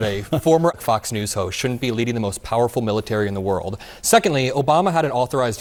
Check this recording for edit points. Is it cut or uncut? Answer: uncut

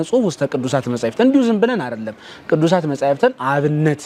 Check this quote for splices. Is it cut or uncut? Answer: uncut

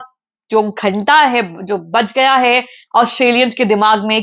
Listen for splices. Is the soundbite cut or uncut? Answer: uncut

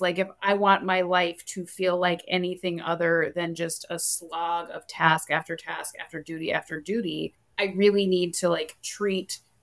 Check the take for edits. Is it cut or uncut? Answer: uncut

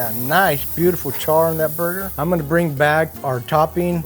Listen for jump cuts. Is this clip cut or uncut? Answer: uncut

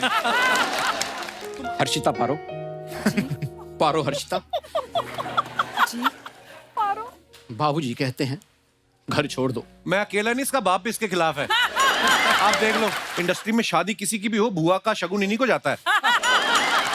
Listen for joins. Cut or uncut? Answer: cut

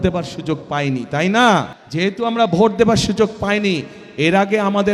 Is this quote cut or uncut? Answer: cut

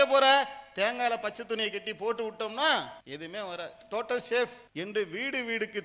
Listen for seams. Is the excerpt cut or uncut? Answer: cut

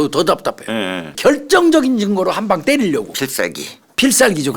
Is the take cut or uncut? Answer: cut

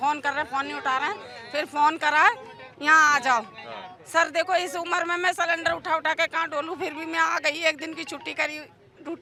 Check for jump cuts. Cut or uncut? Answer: uncut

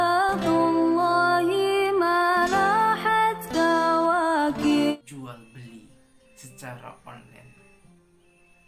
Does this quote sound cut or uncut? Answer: cut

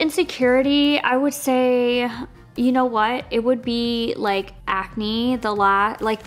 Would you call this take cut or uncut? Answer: uncut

